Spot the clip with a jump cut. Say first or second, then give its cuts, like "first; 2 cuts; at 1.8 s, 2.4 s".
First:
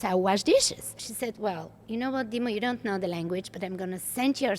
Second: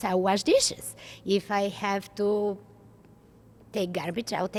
first; 1 cut; at 1.1 s